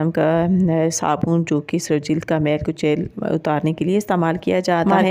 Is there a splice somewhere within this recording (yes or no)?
no